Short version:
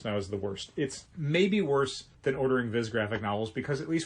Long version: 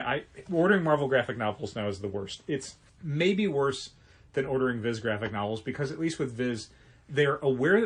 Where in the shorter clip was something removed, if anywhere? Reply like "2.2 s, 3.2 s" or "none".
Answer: 1.1 s, 2.0 s